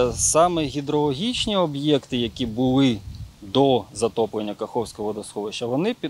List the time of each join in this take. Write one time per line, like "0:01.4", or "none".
none